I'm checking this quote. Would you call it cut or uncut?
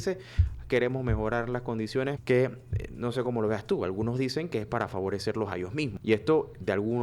cut